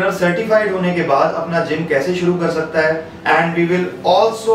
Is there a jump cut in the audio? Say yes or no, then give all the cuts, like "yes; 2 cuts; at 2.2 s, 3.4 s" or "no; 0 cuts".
yes; 1 cut; at 3.1 s